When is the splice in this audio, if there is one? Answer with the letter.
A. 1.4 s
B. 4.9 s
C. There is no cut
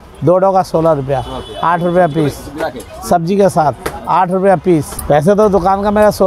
B